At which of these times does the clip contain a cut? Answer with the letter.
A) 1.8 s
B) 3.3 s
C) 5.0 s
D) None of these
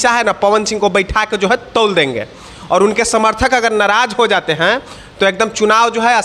D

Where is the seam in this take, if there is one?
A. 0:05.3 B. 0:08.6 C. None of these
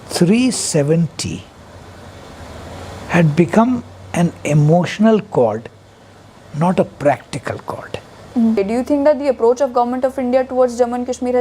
B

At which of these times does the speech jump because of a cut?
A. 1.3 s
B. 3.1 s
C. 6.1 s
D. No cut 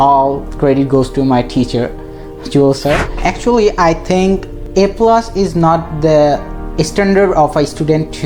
B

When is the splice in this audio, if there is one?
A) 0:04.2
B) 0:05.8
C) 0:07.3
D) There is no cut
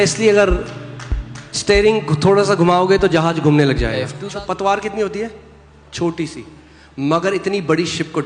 A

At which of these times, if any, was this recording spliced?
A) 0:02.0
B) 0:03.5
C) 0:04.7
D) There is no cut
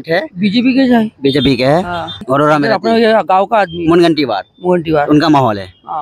A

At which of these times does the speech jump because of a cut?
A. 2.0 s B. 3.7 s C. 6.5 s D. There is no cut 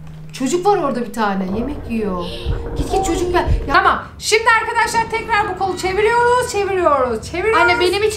B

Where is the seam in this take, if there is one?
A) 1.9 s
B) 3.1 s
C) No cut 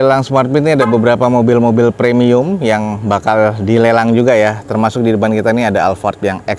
C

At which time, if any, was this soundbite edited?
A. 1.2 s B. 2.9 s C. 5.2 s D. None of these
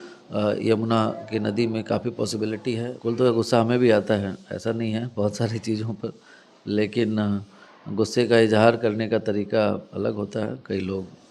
B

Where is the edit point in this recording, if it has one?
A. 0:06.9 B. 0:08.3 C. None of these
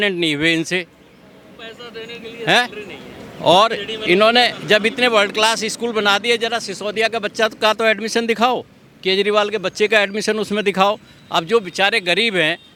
C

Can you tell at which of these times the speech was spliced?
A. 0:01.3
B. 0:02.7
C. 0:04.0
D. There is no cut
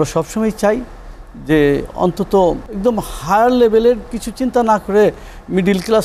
B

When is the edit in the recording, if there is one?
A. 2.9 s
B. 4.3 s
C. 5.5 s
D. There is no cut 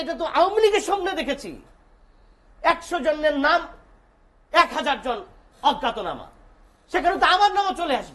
D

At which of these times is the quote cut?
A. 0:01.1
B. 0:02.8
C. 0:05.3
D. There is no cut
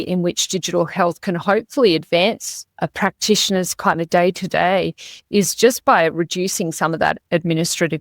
B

